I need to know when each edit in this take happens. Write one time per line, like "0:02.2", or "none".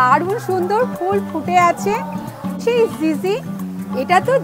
0:02.6